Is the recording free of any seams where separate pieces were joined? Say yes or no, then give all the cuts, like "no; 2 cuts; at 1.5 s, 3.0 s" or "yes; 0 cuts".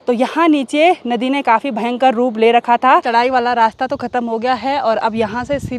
no; 1 cut; at 3.1 s